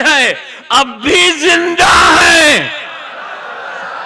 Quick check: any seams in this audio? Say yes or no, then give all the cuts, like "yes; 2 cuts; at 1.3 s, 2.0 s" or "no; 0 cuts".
no; 0 cuts